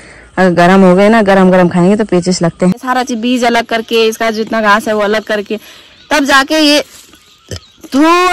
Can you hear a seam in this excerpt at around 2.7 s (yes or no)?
yes